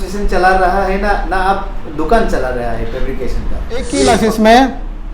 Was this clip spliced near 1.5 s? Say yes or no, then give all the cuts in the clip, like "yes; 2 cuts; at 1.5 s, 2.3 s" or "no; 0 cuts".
no; 1 cut; at 3.9 s